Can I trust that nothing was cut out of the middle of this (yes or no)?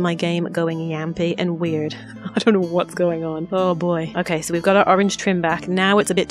yes